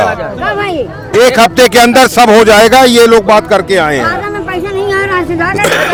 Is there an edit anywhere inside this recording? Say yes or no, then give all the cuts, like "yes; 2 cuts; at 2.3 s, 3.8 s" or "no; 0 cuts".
no; 0 cuts